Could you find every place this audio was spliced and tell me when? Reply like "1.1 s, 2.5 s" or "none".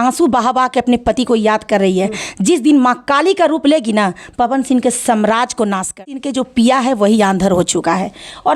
6.2 s